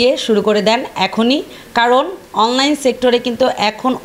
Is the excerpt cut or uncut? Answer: uncut